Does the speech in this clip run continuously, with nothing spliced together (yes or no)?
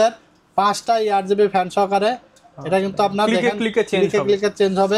yes